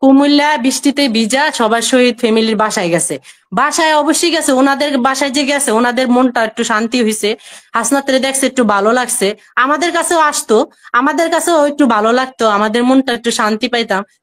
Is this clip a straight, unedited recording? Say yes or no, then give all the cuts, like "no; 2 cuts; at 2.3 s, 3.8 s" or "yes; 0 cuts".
yes; 0 cuts